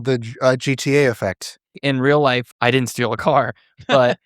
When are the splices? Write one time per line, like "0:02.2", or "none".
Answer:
0:01.8
0:02.5